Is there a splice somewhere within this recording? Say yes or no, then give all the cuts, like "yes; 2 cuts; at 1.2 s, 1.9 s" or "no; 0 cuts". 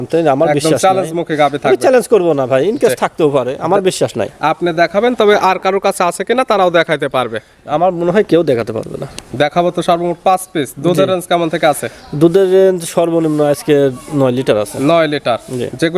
no; 0 cuts